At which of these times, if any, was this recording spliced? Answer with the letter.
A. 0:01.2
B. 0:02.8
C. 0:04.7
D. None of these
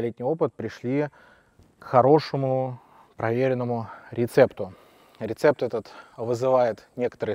D